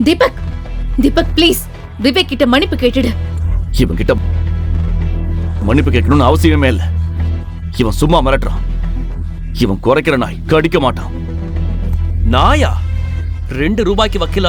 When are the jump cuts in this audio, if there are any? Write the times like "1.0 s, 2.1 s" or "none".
none